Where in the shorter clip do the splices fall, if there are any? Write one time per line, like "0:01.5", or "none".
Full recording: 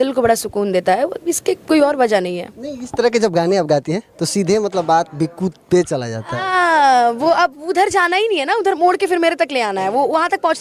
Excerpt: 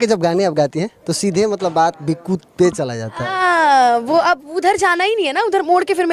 none